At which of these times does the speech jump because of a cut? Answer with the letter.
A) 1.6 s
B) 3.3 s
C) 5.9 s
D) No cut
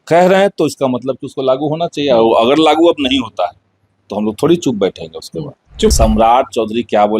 C